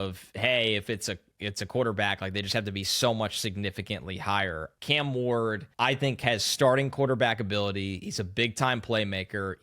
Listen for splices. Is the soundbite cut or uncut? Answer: cut